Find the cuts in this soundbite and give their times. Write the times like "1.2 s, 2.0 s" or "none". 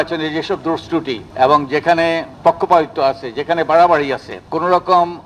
1.2 s, 2.3 s, 4.4 s